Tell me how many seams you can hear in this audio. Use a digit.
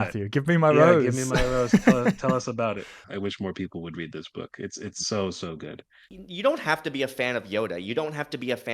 2